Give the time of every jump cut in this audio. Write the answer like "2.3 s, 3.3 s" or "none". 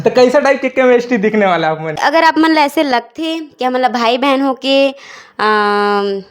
2.0 s